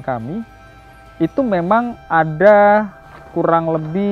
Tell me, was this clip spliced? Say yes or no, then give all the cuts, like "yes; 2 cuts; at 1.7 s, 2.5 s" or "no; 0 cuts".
no; 0 cuts